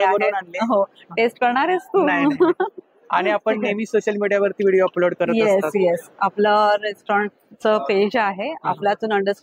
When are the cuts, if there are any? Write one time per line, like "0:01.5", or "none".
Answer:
none